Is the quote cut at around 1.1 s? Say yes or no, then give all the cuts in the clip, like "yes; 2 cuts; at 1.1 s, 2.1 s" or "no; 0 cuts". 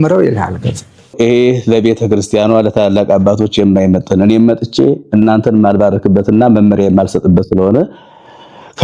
yes; 1 cut; at 1.1 s